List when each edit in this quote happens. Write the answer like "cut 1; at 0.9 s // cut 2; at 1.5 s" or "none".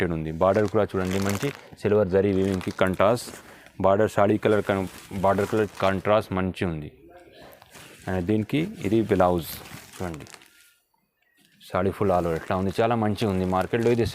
none